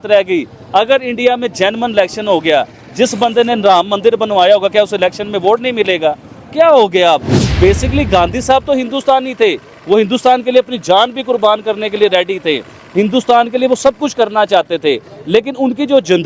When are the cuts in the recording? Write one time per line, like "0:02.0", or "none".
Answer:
0:07.4